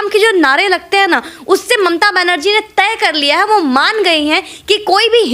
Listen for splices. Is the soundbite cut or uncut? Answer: uncut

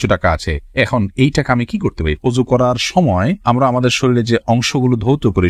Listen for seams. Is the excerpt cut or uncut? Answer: cut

